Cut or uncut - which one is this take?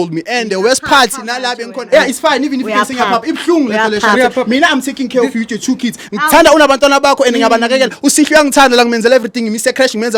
uncut